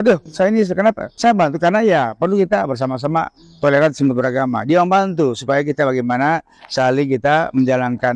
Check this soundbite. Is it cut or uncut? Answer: uncut